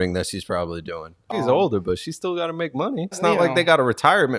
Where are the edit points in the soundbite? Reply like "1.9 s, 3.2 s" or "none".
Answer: 1.3 s, 3.2 s